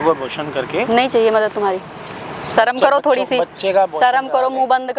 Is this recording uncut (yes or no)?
yes